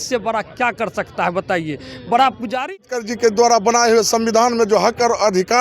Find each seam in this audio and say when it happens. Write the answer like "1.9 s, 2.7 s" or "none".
2.8 s